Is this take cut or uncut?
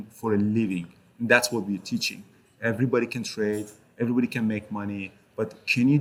uncut